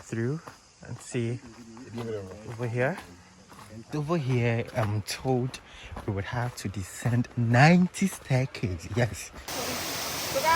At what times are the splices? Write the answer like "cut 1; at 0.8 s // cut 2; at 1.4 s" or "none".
cut 1; at 3.9 s // cut 2; at 9.5 s